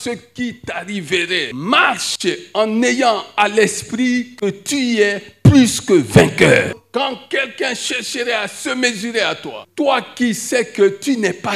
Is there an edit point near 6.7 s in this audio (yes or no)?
yes